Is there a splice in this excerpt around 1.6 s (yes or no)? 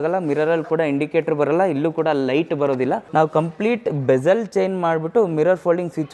no